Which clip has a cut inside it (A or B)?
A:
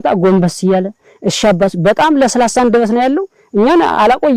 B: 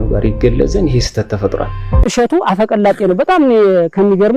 B